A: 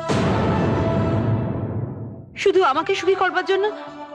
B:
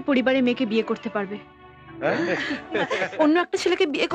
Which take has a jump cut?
B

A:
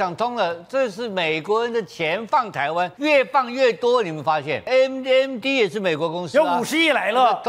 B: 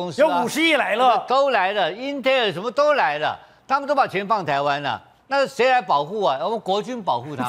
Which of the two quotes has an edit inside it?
A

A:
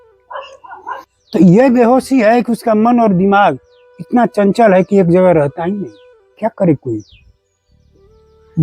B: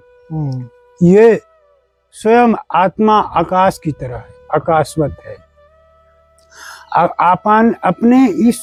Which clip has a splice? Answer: A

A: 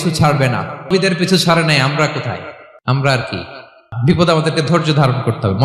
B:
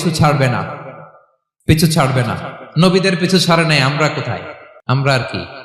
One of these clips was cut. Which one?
A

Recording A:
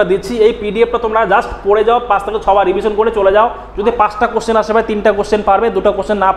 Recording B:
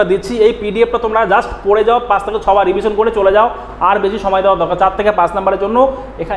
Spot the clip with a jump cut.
A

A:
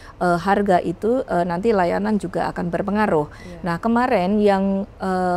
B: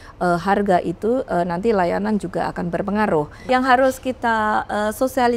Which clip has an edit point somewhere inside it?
B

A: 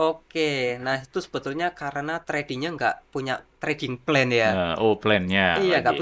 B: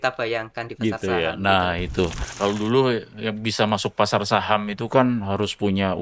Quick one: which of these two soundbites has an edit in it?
B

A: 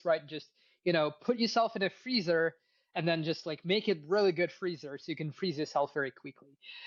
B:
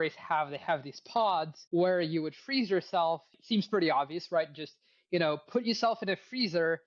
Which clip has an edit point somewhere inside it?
B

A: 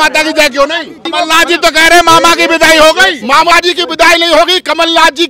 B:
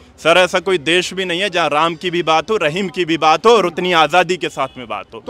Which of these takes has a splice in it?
A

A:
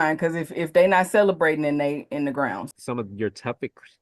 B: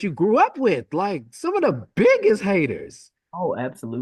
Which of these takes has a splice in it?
A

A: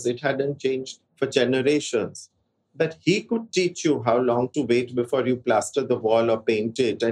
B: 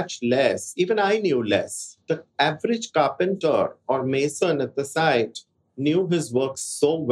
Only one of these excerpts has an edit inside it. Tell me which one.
B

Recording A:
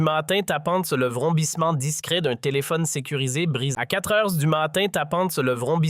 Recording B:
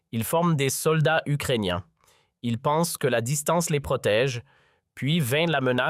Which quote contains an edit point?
A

